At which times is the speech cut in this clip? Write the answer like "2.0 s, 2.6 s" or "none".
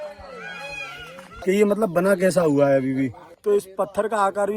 1.3 s, 3.3 s